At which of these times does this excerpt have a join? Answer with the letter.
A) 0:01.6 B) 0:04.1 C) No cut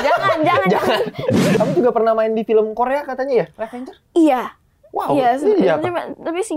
A